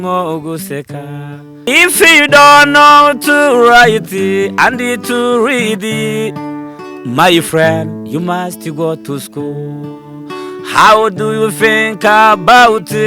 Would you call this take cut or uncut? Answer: cut